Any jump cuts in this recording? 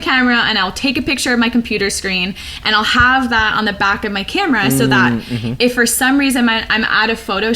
no; 0 cuts

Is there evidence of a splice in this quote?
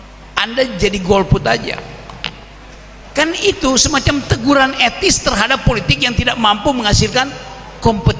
no; 0 cuts

